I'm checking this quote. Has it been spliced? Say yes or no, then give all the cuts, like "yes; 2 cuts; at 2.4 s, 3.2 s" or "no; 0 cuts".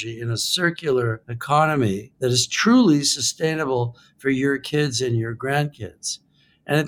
yes; 2 cuts; at 1.3 s, 2.1 s